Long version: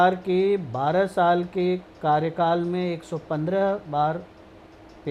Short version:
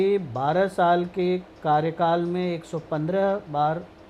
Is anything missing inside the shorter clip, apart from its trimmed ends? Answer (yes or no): no